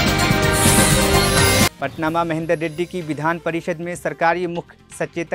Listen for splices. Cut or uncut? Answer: uncut